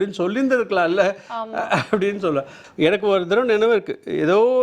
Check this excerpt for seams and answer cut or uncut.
cut